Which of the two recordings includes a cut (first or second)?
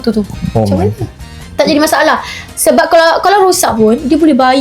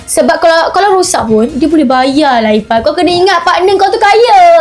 first